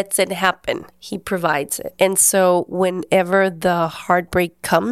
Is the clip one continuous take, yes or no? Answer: no